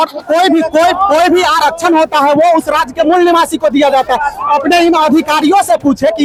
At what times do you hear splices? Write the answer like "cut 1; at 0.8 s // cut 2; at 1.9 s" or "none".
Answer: none